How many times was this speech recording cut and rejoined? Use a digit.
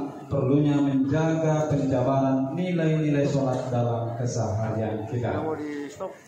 0